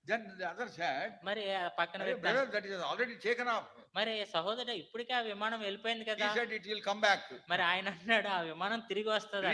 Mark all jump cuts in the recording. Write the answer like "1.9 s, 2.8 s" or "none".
none